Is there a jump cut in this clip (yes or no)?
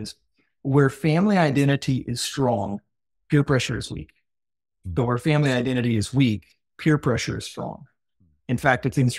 no